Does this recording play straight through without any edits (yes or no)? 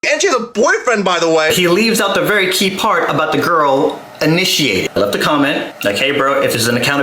no